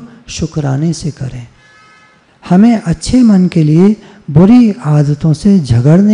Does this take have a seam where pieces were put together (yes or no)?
no